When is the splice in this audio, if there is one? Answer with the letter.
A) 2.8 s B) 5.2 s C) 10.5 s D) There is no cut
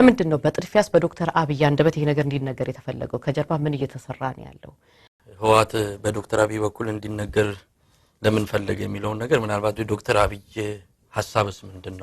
B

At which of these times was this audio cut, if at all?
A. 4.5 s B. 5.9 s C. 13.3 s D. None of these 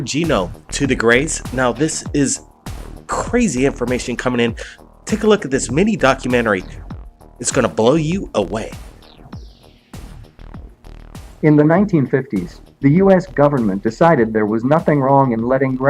A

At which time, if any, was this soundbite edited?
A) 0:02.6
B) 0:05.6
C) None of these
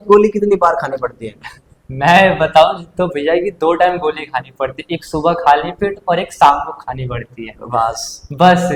C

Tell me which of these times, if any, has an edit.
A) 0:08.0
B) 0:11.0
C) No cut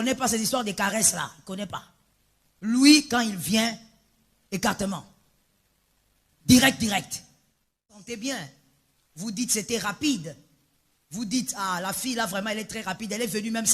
A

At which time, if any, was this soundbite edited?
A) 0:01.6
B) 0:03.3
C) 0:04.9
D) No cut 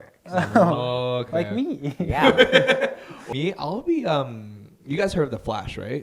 B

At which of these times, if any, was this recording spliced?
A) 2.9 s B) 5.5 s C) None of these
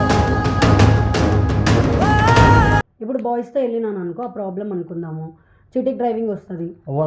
A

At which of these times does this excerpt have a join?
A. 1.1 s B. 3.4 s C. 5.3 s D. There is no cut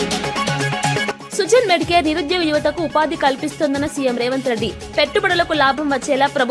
A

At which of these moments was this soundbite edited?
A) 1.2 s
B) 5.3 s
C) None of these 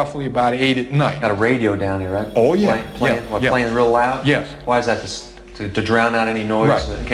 A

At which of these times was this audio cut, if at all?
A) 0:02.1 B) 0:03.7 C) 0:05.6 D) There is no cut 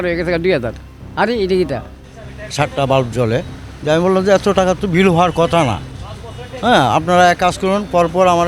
A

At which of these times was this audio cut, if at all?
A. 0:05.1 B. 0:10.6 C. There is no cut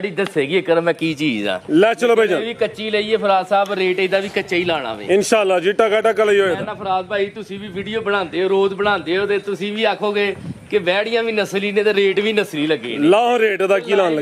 C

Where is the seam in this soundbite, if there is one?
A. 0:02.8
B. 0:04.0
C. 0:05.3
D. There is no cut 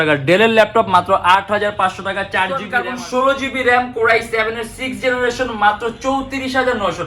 A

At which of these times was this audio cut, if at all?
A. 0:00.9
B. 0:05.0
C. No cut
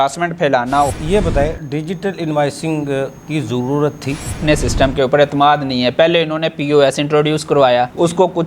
A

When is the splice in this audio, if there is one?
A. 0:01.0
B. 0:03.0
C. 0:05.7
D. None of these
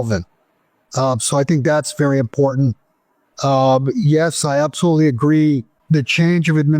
C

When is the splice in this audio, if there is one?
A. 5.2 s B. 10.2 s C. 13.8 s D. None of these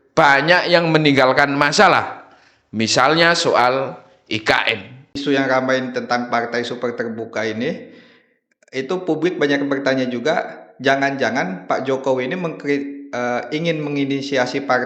A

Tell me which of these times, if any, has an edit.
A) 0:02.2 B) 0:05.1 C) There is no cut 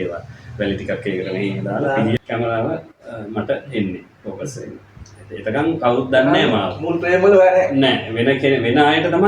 A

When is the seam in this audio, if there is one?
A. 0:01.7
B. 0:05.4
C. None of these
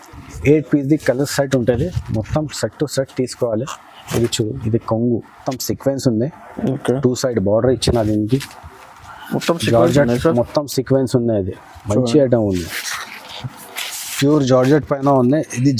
B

